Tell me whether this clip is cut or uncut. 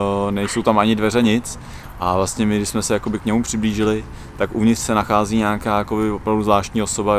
uncut